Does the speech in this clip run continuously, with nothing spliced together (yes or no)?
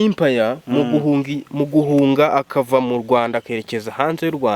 yes